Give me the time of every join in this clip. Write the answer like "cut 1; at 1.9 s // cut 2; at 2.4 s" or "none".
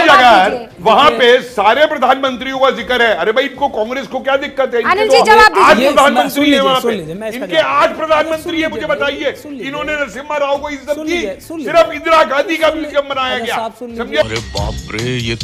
cut 1; at 14.2 s